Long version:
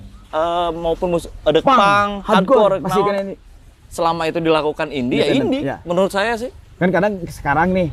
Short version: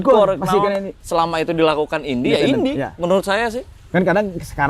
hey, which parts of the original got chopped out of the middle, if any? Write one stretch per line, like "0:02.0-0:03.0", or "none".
0:03.4-0:03.8